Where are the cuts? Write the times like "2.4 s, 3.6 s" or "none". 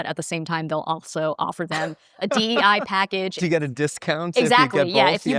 3.4 s